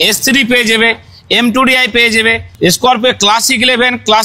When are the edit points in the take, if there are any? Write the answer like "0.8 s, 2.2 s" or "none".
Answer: 2.5 s